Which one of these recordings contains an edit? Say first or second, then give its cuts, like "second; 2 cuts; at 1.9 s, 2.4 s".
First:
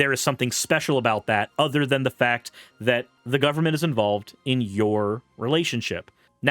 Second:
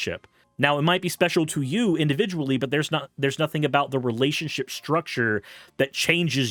first; 1 cut; at 3.2 s